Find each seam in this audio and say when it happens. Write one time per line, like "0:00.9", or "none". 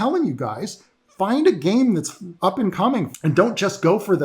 0:03.1